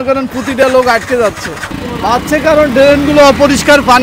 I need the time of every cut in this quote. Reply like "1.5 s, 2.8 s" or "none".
none